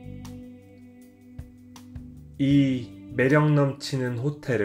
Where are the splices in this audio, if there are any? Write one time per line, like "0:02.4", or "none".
0:02.3